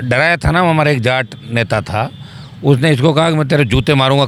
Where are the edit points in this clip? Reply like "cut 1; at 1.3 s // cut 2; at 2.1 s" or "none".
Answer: none